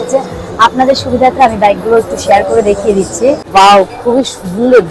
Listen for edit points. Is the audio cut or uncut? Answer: cut